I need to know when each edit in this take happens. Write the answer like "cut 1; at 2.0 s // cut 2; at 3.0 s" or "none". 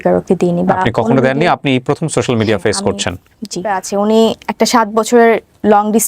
cut 1; at 3.7 s